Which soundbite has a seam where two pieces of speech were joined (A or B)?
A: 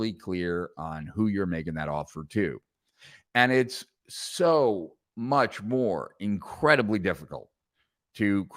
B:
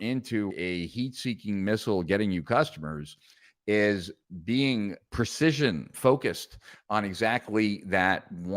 B